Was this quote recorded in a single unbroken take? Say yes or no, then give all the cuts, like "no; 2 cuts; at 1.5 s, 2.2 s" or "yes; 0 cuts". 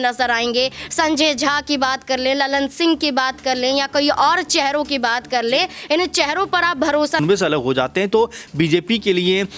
no; 1 cut; at 7.2 s